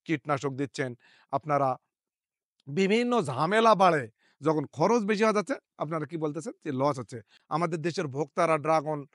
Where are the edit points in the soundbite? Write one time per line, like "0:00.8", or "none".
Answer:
0:07.3